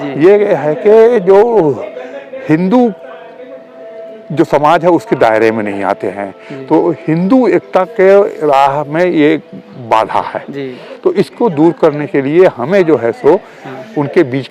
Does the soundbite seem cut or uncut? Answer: uncut